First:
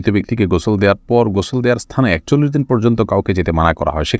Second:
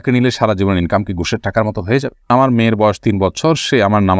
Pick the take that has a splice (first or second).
second